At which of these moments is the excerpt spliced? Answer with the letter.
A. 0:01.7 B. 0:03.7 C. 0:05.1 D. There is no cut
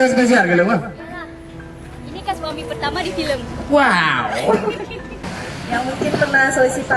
C